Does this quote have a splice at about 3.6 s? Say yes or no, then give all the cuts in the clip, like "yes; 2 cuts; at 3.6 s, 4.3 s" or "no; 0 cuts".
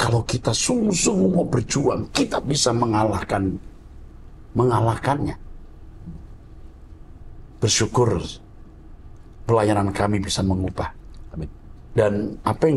no; 0 cuts